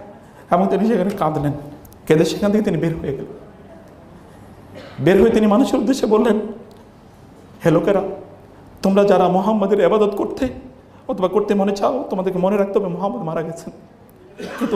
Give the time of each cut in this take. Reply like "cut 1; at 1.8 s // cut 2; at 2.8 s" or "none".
none